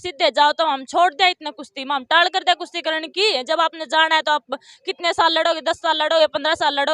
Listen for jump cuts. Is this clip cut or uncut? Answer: uncut